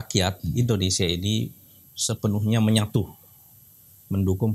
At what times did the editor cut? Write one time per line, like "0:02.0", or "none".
none

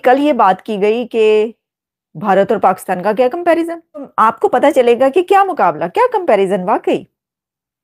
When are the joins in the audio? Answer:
0:04.1

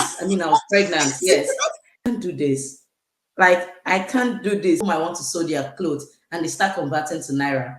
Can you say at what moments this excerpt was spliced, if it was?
0:02.1
0:04.8

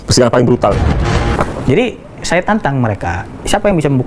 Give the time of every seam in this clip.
0:01.4

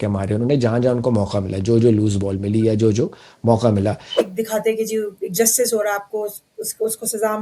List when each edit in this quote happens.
0:04.3

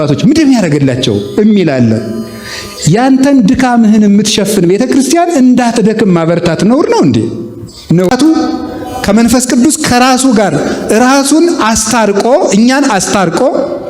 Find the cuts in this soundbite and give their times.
0:08.1

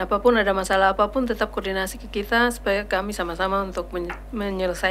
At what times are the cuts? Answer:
none

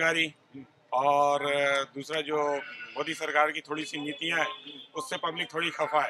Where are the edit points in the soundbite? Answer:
none

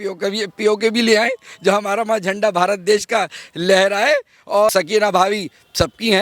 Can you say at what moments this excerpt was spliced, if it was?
0:04.7

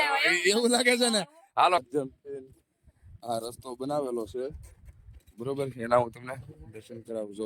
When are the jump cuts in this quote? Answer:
0:01.8

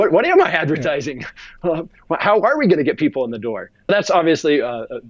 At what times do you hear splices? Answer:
0:03.9

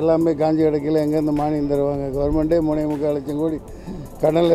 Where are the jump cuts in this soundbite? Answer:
none

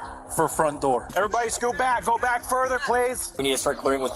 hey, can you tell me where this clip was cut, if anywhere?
0:01.1
0:03.3

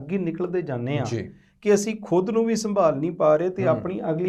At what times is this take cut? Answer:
none

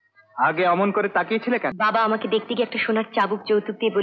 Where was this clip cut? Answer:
0:01.7

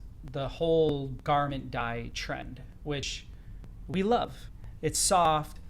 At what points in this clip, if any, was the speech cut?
0:04.5

